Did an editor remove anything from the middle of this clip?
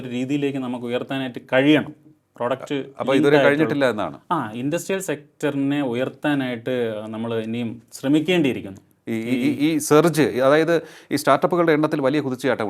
no; 0 cuts

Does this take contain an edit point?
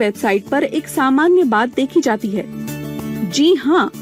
no; 0 cuts

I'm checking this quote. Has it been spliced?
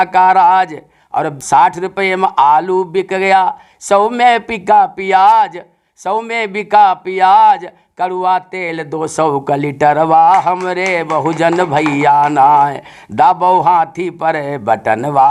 yes; 1 cut; at 1.4 s

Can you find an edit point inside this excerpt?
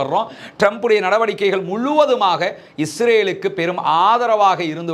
no; 0 cuts

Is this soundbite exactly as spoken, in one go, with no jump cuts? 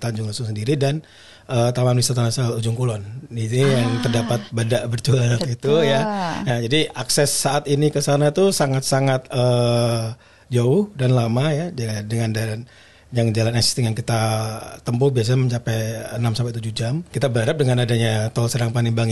no; 1 cut; at 17.1 s

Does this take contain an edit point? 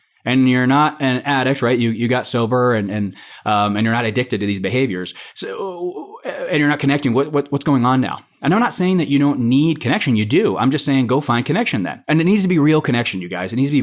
no; 0 cuts

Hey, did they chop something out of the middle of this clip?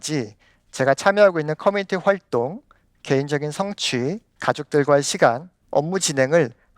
yes; 2 cuts; at 4.3 s, 5.5 s

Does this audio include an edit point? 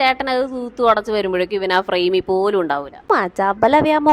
yes; 1 cut; at 3.0 s

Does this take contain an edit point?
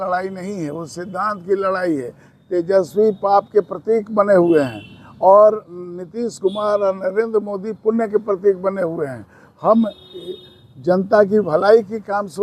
no; 0 cuts

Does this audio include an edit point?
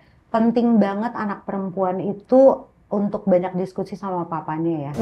no; 0 cuts

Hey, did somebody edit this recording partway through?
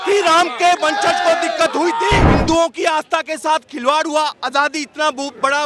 yes; 1 cut; at 2.3 s

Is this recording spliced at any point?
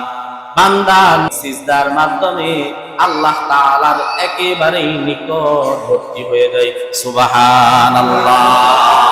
yes; 1 cut; at 1.3 s

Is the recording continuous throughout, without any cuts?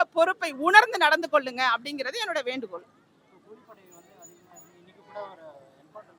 yes; 0 cuts

